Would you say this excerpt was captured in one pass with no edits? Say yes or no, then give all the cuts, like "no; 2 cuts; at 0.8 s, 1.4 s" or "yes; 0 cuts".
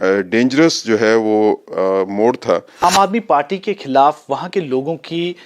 no; 1 cut; at 2.8 s